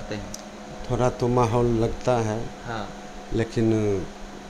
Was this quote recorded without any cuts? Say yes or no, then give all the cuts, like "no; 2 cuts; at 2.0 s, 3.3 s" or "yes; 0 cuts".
yes; 0 cuts